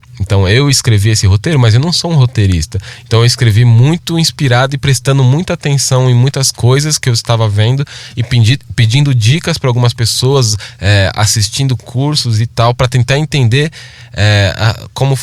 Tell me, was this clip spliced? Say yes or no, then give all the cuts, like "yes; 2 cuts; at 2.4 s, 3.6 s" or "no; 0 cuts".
no; 0 cuts